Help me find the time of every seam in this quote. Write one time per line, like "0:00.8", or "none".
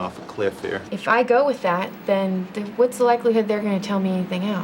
0:00.8
0:03.6